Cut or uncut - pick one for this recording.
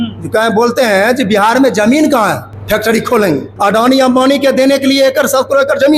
cut